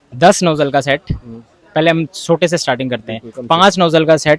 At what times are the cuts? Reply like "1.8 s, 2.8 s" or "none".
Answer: none